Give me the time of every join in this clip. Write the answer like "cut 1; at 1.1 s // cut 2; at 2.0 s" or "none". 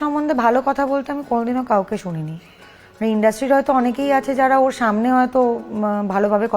none